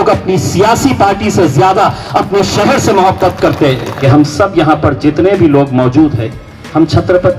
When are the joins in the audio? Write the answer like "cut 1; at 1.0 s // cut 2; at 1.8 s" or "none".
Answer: cut 1; at 4.0 s